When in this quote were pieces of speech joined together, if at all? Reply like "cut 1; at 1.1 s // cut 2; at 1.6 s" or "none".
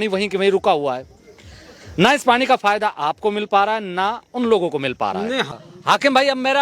cut 1; at 5.5 s